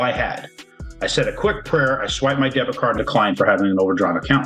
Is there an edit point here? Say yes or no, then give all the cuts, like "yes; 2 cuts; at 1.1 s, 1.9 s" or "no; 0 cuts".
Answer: yes; 1 cut; at 3.0 s